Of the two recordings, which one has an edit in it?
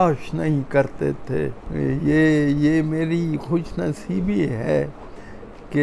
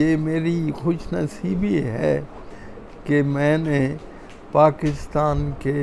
first; 1 cut; at 1.6 s

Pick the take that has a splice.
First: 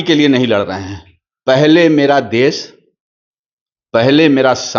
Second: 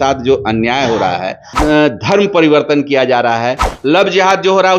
second; 2 cuts; at 1.5 s, 3.7 s

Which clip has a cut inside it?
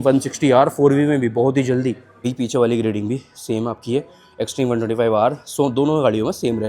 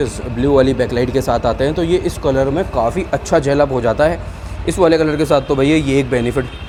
first; 1 cut; at 2.3 s

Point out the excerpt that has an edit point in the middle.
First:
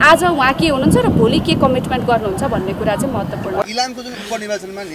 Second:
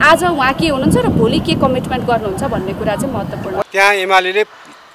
second; 1 cut; at 3.7 s

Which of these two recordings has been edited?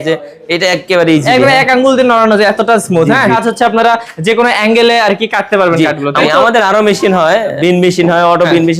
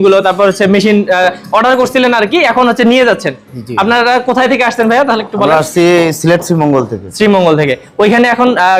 first; 3 cuts; at 3.4 s, 6.2 s, 7.5 s

